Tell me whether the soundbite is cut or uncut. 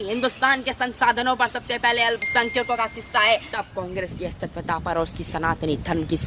cut